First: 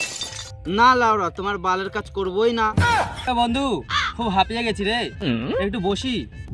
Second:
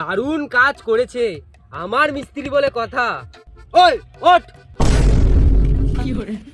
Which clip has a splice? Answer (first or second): first